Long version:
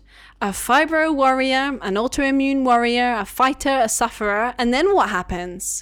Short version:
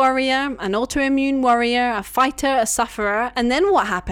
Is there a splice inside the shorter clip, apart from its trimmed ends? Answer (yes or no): no